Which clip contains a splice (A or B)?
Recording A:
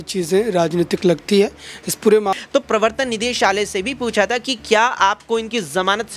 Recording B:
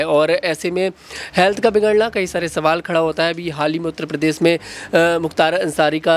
A